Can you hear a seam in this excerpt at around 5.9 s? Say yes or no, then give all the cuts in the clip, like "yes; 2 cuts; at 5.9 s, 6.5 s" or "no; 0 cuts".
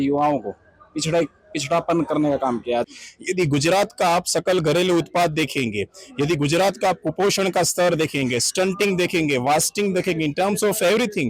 no; 1 cut; at 2.9 s